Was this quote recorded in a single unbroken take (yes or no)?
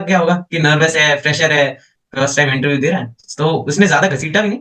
yes